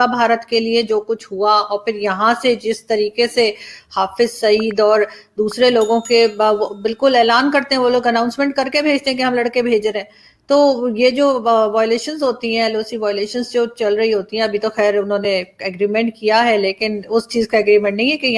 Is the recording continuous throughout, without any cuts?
yes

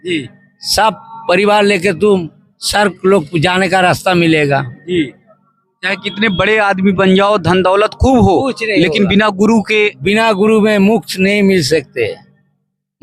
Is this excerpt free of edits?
yes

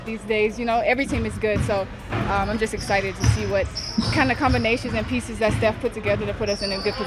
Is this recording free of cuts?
yes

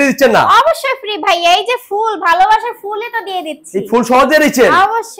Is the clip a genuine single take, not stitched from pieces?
yes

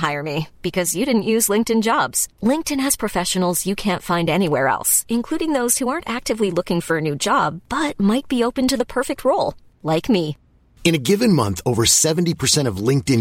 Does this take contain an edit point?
no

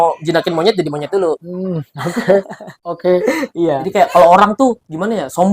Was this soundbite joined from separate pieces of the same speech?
yes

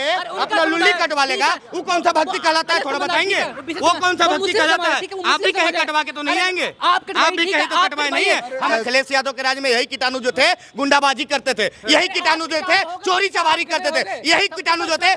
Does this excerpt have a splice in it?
yes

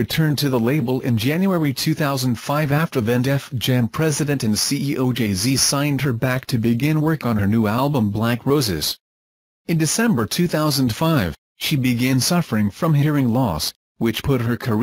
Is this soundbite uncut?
no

